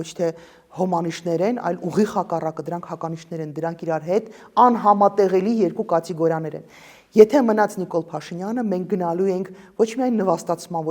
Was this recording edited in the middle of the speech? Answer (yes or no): no